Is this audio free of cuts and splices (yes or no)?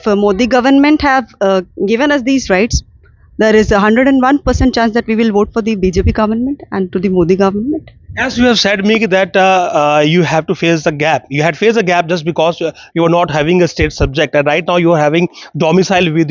yes